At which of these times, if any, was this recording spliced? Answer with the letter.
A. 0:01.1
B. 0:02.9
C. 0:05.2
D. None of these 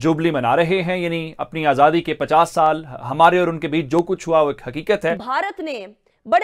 C